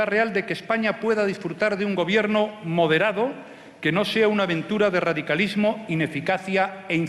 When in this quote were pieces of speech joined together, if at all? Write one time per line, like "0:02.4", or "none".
none